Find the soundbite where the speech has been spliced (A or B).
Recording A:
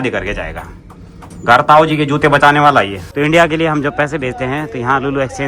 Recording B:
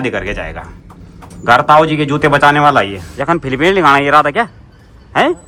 A